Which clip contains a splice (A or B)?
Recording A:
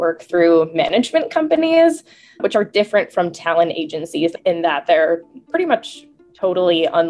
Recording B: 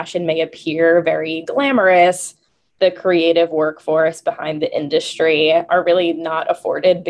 A